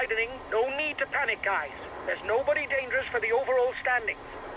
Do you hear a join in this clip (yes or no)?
no